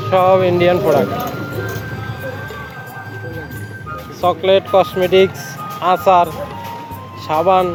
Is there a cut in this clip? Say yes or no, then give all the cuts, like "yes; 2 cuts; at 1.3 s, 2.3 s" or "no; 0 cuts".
no; 0 cuts